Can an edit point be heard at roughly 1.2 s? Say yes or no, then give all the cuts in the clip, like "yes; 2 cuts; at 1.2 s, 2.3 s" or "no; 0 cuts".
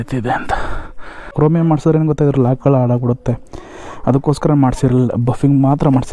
yes; 1 cut; at 1.2 s